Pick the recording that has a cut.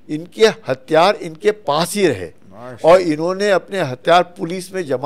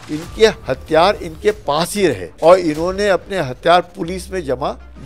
second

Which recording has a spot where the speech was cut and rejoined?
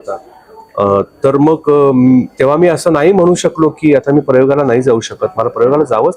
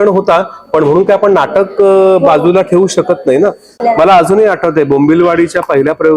second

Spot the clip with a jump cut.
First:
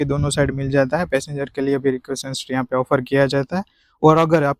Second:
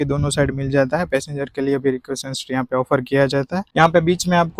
second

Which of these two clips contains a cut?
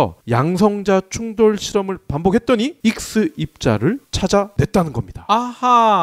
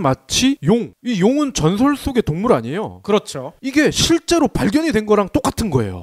first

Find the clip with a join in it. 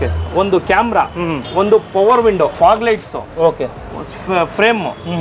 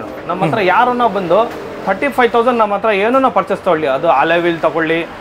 first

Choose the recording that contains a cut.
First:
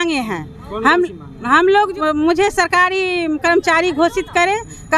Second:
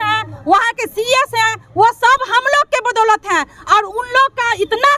first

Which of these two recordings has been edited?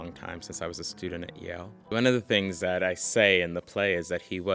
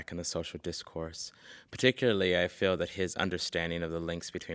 first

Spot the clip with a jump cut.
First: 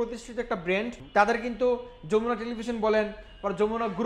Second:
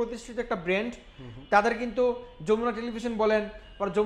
first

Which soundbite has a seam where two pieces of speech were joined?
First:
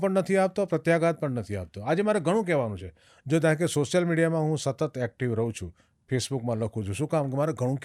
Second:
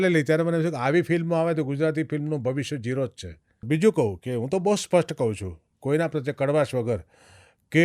second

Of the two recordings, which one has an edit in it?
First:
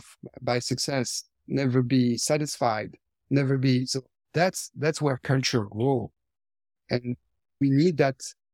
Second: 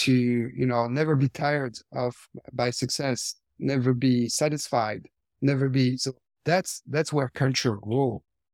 first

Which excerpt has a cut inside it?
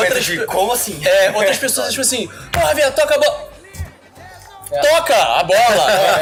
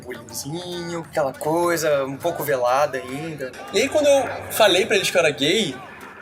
second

